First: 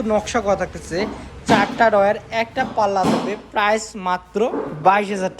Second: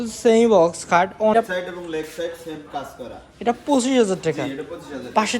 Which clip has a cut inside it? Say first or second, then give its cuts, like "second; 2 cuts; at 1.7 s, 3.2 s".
second; 1 cut; at 1.3 s